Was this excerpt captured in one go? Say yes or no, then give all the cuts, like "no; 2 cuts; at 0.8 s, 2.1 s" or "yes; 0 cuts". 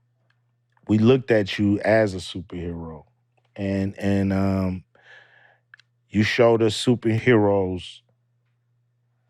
no; 1 cut; at 7.2 s